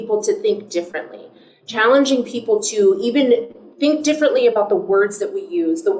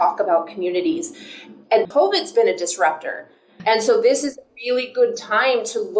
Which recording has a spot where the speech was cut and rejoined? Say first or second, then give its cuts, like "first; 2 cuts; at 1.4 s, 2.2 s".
second; 2 cuts; at 1.9 s, 3.6 s